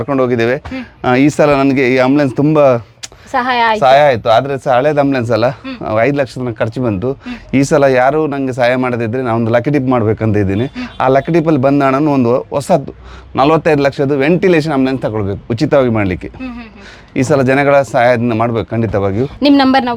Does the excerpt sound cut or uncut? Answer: uncut